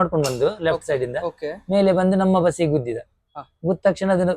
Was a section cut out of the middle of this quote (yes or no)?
no